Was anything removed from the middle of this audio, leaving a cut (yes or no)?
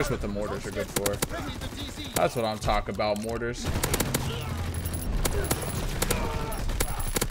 yes